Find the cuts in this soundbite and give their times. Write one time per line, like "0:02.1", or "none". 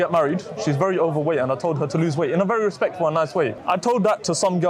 0:03.6

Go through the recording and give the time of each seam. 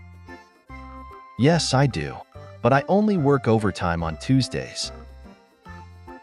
0:01.3
0:04.7

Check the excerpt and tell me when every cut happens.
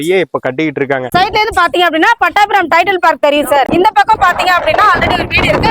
0:01.1

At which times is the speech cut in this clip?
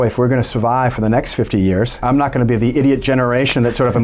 0:02.0

